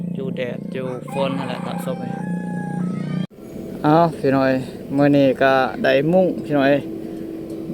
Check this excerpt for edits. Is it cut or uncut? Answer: cut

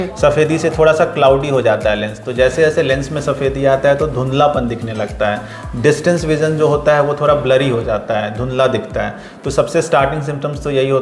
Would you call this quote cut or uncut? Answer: uncut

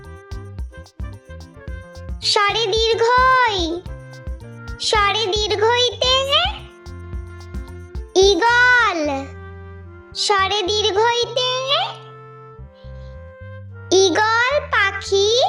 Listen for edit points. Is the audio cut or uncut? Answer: cut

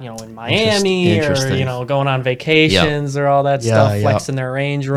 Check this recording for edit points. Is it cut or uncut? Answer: uncut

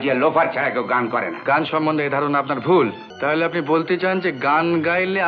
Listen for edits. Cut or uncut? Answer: cut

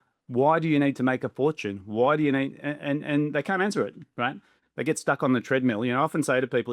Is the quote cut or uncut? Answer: uncut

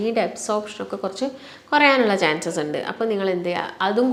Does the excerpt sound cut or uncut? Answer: uncut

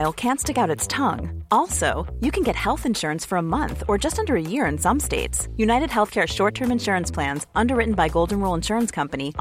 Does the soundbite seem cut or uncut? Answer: uncut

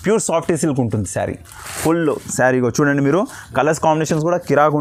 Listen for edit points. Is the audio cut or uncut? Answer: uncut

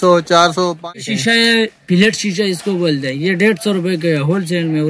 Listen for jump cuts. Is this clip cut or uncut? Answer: cut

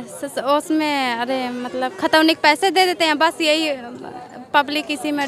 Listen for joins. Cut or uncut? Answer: uncut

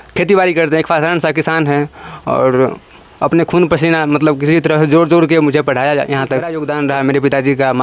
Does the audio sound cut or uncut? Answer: cut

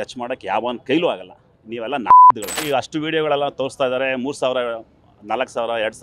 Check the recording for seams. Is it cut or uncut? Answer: cut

